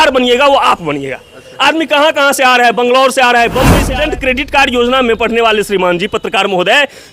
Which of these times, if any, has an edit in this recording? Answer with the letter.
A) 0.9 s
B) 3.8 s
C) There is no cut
B